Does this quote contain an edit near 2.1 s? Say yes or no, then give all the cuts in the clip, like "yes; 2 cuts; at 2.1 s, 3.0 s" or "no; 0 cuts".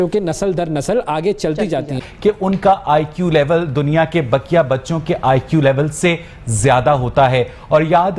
yes; 1 cut; at 2.1 s